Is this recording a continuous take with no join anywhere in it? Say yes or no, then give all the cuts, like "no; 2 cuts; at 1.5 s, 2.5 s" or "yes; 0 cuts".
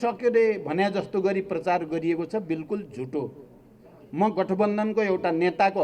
yes; 0 cuts